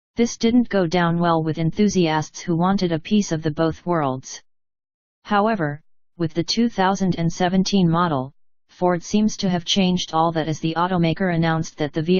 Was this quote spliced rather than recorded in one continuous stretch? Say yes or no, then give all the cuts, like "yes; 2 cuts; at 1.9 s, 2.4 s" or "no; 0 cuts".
yes; 1 cut; at 4.4 s